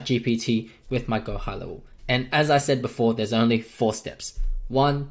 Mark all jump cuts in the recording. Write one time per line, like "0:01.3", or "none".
0:01.9

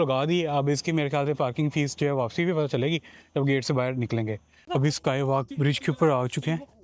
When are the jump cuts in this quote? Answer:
0:04.5

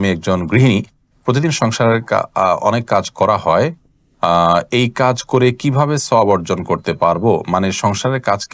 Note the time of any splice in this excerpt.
none

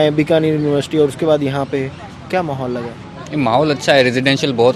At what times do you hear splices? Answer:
none

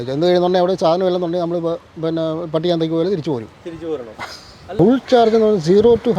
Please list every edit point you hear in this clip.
0:04.8

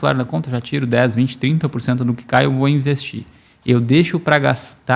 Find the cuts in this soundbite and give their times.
none

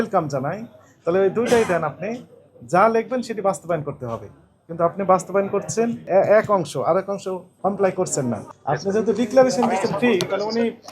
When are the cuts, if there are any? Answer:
0:06.0
0:07.5
0:08.5

